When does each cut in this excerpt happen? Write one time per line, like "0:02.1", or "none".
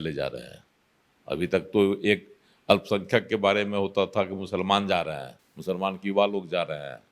none